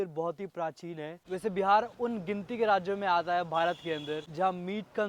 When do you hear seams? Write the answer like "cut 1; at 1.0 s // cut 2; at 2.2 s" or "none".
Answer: cut 1; at 1.2 s